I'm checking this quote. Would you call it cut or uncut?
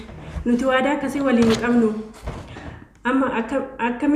uncut